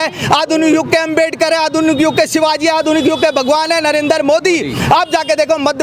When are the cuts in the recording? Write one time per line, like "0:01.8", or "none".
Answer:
none